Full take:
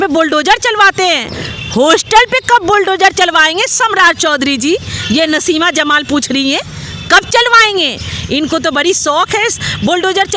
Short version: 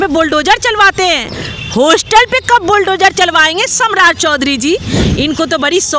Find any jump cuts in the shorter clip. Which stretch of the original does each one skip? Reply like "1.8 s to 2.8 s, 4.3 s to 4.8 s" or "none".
4.9 s to 8.1 s